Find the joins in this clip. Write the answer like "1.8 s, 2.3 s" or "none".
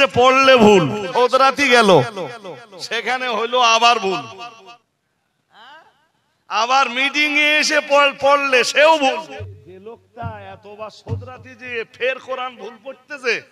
1.1 s, 4.8 s, 9.4 s